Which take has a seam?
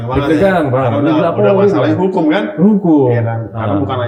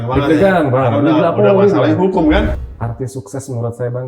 second; 1 cut; at 2.5 s

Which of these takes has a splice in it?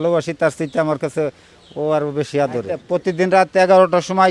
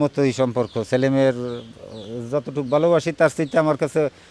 first; 1 cut; at 2.8 s

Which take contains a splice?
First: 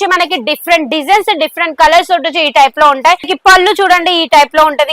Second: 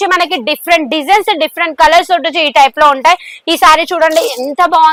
first; 1 cut; at 3.3 s

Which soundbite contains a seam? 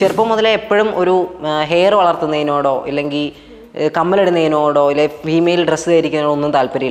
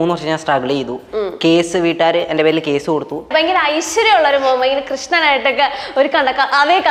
second; 1 cut; at 3.3 s

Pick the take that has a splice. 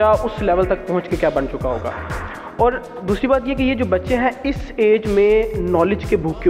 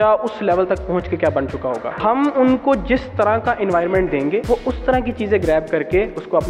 second; 2 cuts; at 1.9 s, 4.4 s

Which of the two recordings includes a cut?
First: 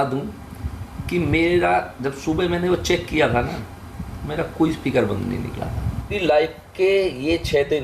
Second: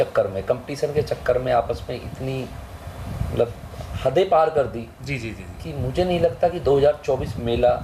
first; 1 cut; at 6.1 s

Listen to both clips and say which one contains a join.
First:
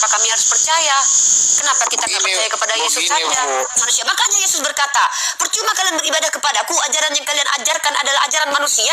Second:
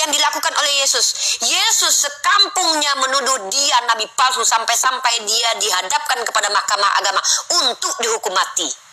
first; 1 cut; at 3.8 s

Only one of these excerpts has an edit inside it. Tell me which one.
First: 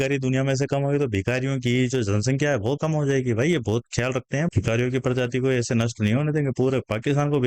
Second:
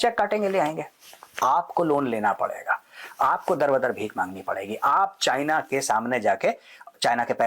first; 1 cut; at 4.4 s

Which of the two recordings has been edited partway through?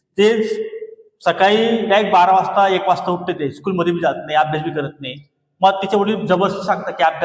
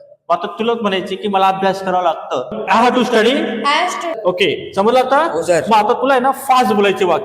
second; 1 cut; at 4.1 s

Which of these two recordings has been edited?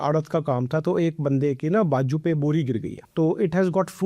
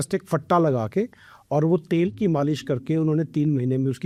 first; 1 cut; at 3.0 s

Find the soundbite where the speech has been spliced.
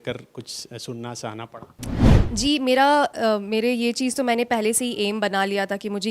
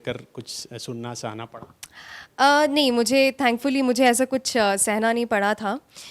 first; 1 cut; at 2.1 s

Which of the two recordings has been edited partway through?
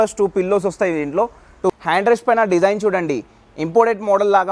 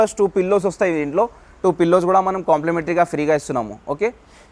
first; 1 cut; at 1.7 s

